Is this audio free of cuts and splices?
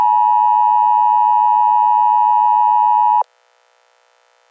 no; 1 cut; at 3.2 s

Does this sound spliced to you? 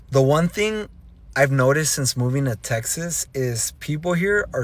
no; 0 cuts

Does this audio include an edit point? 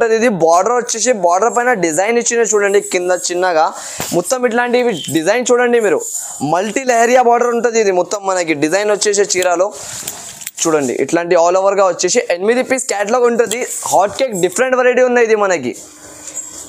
no; 0 cuts

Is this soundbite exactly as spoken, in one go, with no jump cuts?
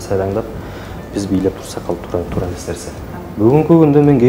no; 1 cut; at 3.2 s

